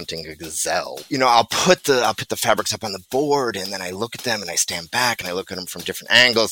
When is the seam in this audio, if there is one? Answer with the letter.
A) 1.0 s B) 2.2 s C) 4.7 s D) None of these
A